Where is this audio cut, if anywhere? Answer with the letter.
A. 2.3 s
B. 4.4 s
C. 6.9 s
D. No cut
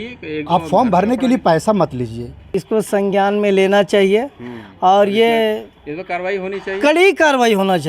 A